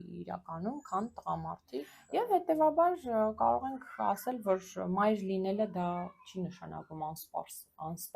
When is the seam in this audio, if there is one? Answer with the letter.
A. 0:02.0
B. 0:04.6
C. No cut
A